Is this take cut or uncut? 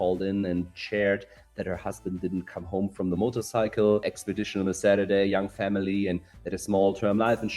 cut